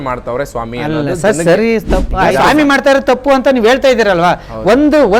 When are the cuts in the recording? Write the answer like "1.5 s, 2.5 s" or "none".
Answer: 2.2 s

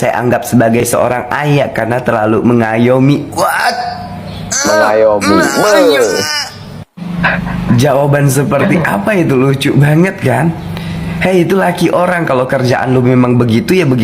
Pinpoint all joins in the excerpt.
none

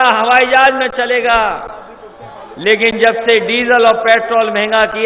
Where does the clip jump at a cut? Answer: none

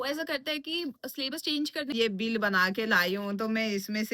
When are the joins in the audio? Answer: 1.9 s

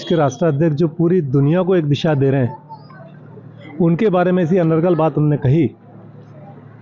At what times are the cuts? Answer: none

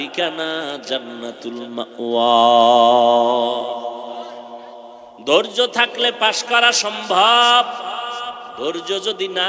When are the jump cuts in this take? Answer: 5.0 s

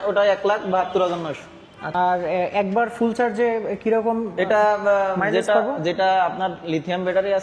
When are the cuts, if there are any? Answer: 1.9 s

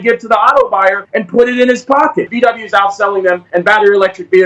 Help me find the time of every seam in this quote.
1.1 s, 2.3 s, 3.4 s

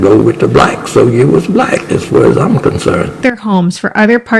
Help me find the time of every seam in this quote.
3.2 s

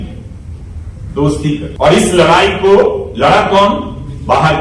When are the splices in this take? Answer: 1.7 s

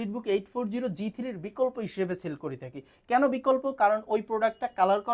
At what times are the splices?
none

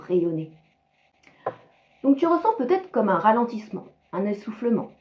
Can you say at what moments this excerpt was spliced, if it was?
none

